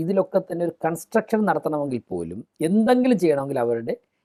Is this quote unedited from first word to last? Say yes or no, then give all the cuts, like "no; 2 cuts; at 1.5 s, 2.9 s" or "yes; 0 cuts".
yes; 0 cuts